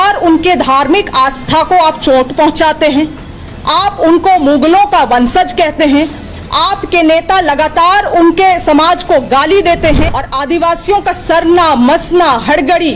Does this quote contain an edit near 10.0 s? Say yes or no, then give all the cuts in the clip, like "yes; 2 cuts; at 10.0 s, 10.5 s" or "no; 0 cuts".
yes; 1 cut; at 10.0 s